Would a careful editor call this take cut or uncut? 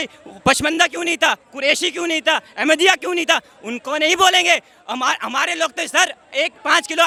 uncut